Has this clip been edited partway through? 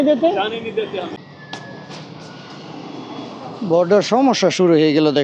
yes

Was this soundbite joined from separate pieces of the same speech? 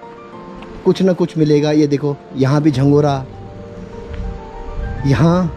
no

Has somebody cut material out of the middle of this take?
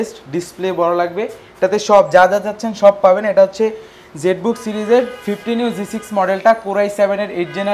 no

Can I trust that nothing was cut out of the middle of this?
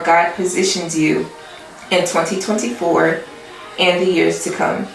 yes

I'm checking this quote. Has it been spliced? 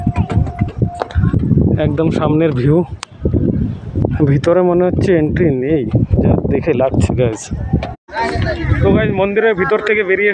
yes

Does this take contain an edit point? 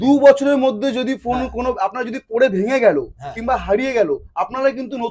no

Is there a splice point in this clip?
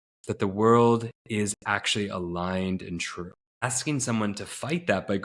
yes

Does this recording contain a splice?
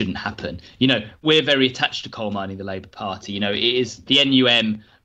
yes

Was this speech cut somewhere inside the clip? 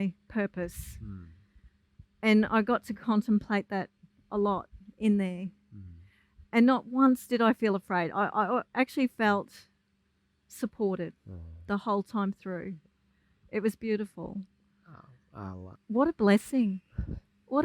yes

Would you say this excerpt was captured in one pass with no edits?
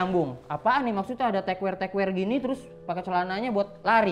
yes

